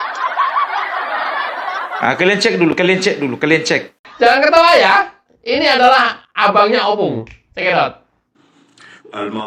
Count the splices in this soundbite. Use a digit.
2